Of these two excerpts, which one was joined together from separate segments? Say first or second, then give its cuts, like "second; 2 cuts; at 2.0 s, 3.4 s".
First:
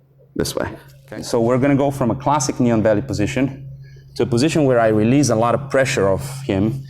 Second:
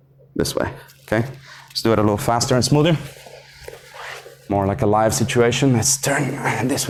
first; 1 cut; at 0.9 s